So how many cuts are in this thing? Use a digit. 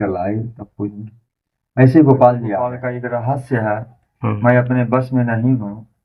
1